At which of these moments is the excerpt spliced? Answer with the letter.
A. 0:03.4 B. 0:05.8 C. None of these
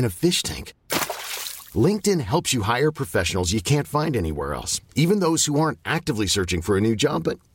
C